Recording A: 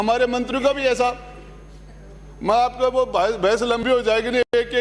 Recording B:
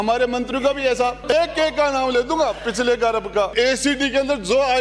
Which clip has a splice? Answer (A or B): B